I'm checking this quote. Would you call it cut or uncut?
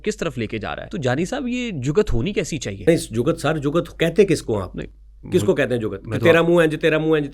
cut